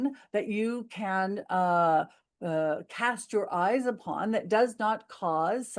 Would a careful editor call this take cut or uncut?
uncut